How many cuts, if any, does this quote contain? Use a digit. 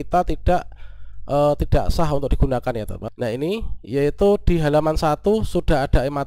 1